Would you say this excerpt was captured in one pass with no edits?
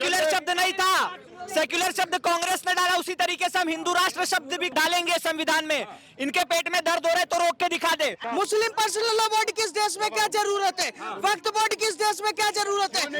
no; 2 cuts; at 4.7 s, 8.2 s

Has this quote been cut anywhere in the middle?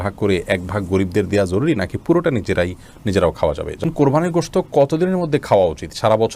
yes; 1 cut; at 3.8 s

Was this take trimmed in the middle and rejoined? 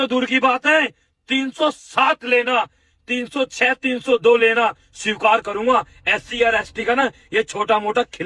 no; 0 cuts

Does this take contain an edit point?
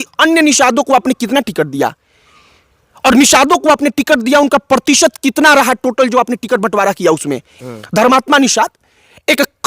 yes; 1 cut; at 7.5 s

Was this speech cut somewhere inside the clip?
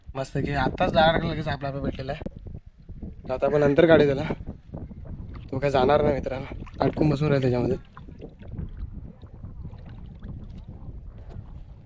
no; 0 cuts

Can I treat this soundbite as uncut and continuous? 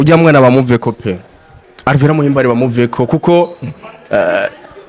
yes; 0 cuts

